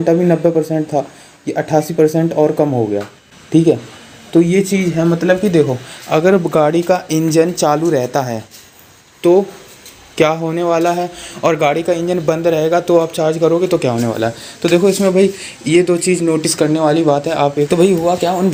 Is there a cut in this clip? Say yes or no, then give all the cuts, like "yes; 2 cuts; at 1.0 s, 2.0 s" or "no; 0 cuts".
no; 0 cuts